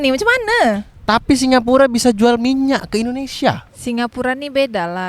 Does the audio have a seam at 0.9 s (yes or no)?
no